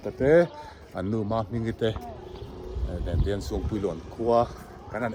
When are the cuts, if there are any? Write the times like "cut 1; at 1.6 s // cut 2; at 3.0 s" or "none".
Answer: none